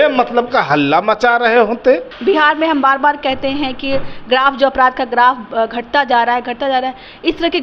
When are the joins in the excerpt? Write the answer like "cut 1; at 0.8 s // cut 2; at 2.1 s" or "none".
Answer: cut 1; at 2.1 s